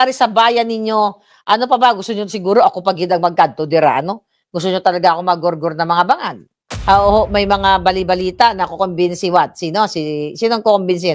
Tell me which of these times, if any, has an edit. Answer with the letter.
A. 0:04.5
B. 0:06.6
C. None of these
B